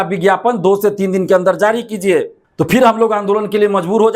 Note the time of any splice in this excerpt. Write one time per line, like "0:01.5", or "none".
0:02.4